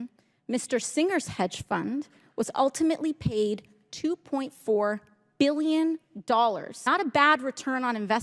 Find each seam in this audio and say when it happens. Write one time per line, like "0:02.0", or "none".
0:06.8